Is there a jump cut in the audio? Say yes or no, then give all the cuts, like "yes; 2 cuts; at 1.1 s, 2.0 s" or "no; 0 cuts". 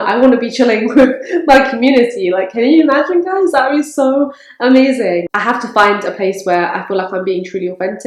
no; 0 cuts